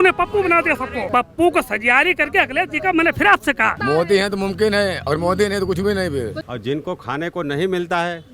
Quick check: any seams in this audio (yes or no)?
yes